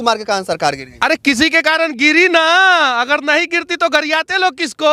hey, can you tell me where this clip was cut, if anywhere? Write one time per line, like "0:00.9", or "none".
none